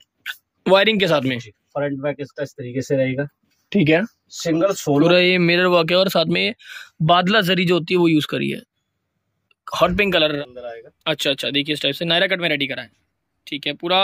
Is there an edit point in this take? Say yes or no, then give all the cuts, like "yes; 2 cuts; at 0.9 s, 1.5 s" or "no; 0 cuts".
yes; 2 cuts; at 5.1 s, 10.4 s